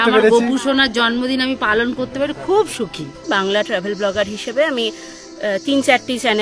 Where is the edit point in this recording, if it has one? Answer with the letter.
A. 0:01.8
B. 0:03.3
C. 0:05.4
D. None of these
B